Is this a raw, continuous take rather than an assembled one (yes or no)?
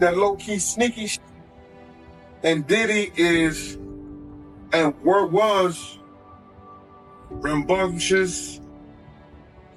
yes